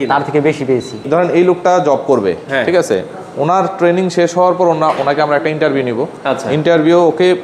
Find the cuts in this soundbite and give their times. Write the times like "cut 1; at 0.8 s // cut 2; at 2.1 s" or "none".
cut 1; at 1.0 s